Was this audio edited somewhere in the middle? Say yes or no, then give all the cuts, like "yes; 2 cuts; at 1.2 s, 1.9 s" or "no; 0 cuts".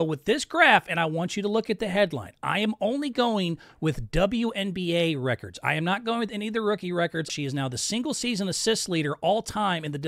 yes; 1 cut; at 7.3 s